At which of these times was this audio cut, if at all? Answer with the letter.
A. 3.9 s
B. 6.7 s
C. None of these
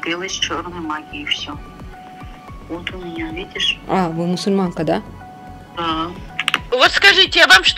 B